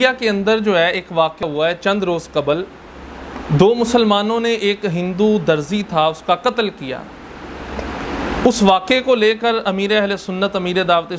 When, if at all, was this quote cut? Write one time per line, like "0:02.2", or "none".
0:01.4